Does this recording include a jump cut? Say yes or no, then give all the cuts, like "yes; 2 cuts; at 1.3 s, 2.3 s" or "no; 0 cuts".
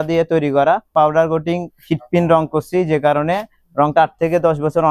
yes; 1 cut; at 0.9 s